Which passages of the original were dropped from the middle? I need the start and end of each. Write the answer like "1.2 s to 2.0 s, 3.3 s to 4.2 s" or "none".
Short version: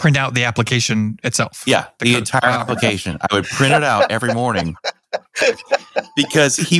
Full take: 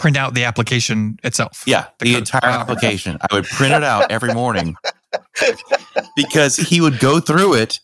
none